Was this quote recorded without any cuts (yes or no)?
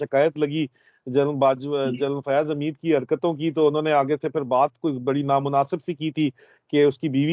yes